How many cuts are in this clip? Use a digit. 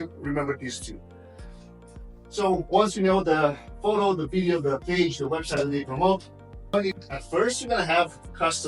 1